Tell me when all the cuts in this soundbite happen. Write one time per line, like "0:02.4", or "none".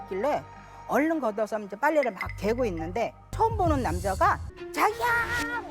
0:03.2
0:04.5